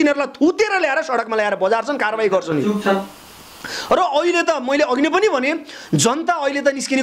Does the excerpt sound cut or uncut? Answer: uncut